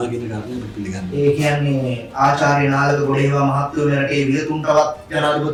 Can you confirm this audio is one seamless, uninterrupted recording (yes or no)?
yes